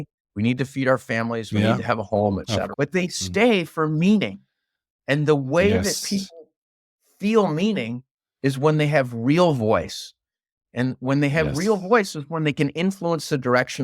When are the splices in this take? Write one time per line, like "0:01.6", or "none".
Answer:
0:02.7

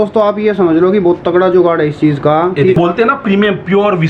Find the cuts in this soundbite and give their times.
0:02.8

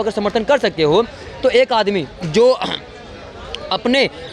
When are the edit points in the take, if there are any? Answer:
none

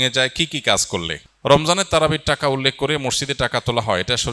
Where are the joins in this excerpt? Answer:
0:01.2

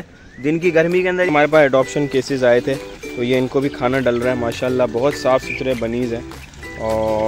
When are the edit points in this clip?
0:01.3

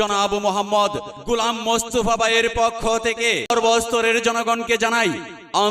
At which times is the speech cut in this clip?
0:03.5

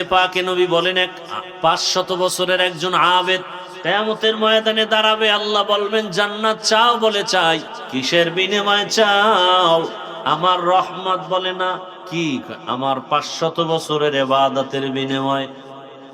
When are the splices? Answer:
0:03.6
0:07.8
0:10.1
0:12.0

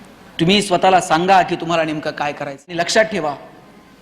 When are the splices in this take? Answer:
0:02.7

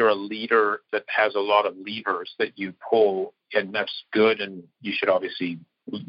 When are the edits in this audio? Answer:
none

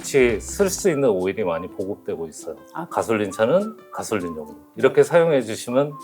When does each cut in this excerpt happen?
0:02.8

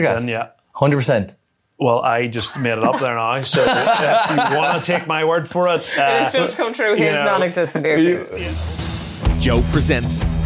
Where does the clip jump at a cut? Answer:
0:08.3

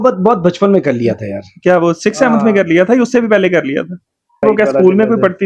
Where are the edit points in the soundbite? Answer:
0:04.4

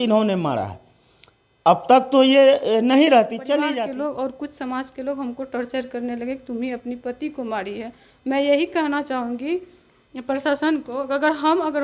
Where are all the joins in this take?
0:03.7

